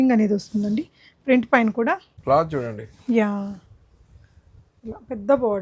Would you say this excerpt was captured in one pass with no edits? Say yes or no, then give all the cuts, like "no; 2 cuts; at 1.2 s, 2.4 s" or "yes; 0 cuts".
no; 1 cut; at 2.1 s